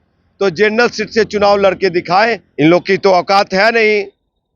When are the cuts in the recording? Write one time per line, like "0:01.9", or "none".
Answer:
0:02.4